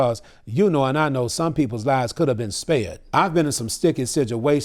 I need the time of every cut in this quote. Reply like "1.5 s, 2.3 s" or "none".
3.0 s